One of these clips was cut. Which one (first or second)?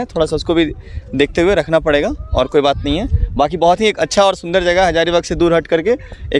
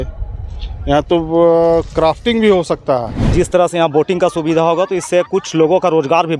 second